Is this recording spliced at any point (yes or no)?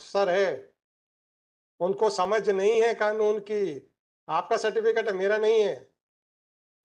no